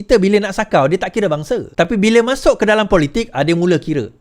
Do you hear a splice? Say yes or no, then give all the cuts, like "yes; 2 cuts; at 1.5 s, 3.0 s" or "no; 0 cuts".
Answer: yes; 1 cut; at 1.7 s